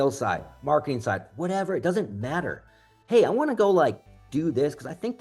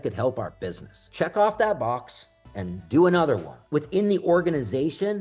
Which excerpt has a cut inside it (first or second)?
second